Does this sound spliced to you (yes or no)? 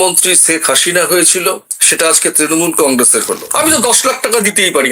yes